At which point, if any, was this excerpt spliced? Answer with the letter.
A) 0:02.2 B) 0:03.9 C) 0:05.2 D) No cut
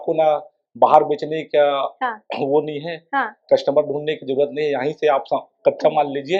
D